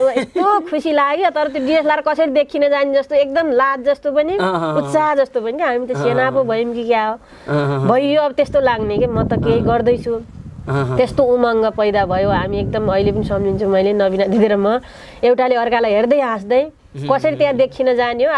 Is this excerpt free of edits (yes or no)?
yes